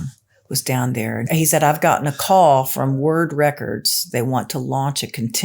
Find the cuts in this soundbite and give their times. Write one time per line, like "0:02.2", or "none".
0:01.2
0:04.0